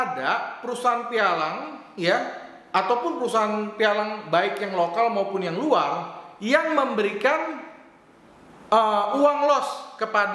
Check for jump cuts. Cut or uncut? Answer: uncut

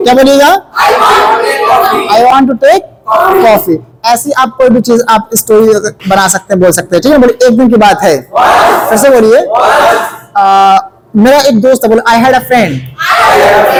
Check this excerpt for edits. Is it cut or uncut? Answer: uncut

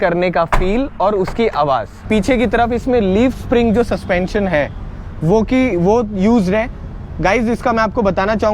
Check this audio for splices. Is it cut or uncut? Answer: cut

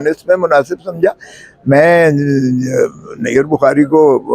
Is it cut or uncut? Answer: uncut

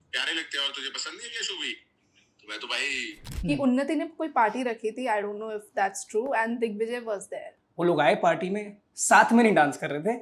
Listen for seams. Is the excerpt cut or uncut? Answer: cut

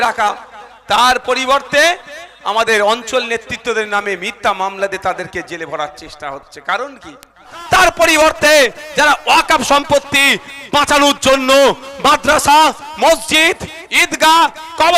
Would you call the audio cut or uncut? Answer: cut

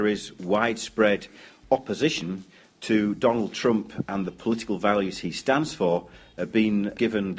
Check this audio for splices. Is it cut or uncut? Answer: uncut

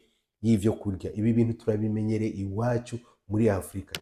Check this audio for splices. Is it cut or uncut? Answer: uncut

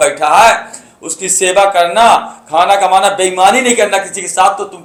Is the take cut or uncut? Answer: uncut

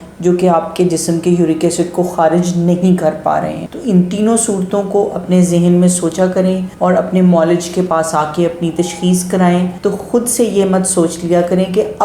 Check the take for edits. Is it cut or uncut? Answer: cut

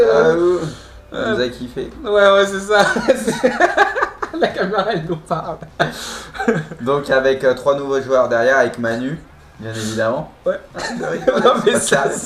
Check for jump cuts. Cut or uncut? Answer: uncut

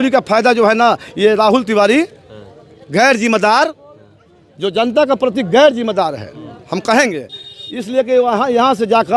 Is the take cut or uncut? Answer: uncut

